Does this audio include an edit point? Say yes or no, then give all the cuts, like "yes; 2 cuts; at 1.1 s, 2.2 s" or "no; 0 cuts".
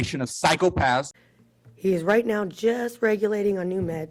no; 0 cuts